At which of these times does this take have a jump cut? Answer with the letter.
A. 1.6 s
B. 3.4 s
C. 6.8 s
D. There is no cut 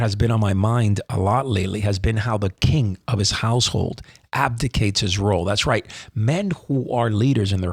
D